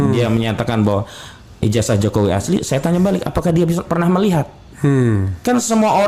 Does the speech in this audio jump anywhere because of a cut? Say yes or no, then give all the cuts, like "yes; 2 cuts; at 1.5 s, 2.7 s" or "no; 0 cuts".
no; 0 cuts